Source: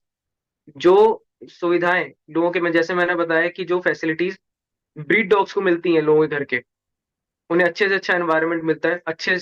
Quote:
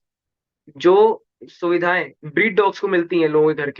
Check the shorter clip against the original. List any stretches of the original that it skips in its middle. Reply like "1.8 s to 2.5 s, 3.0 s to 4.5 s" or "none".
2.1 s to 4.9 s